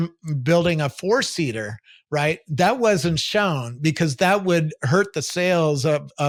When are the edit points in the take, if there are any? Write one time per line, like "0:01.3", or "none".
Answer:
none